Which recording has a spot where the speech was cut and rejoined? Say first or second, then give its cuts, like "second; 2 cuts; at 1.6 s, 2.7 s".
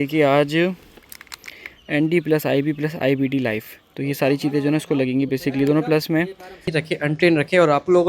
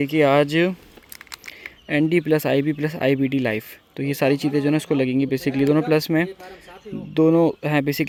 first; 1 cut; at 6.6 s